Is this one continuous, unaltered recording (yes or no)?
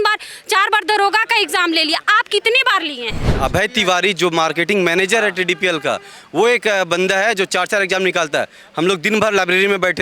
no